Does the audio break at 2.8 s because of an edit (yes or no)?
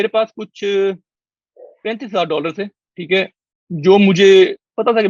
no